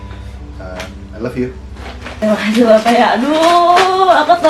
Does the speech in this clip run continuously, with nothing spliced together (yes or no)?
no